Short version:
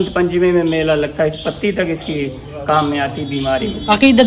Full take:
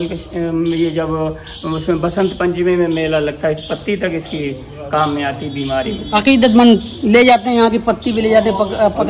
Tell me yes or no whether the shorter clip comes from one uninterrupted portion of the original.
yes